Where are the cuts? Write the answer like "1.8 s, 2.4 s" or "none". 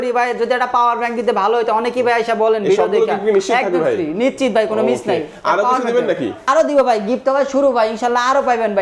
6.4 s

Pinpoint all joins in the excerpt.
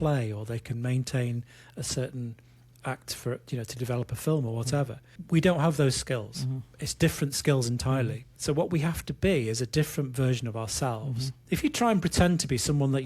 5.1 s, 8.3 s, 11.3 s

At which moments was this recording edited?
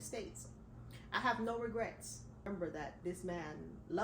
2.5 s

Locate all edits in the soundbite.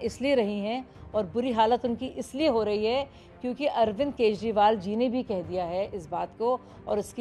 none

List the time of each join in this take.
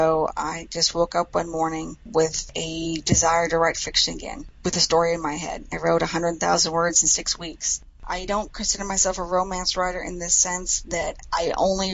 8.0 s

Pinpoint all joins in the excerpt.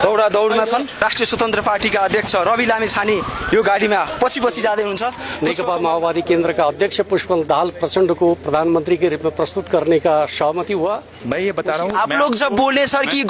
1.0 s, 5.2 s, 11.1 s

